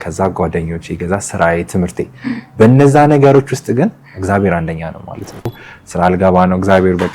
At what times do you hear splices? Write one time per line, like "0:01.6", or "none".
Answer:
0:05.6

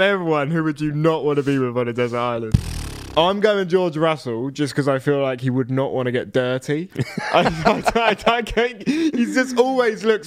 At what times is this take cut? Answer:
0:02.5
0:07.0

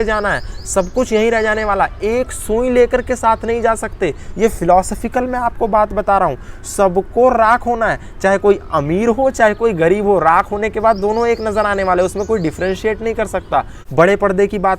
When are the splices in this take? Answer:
0:13.9

